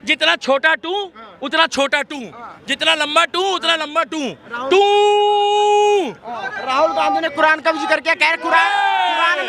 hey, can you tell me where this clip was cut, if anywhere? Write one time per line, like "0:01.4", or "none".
none